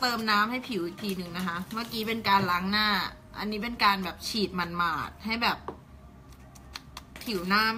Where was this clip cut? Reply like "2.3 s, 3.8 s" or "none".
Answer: none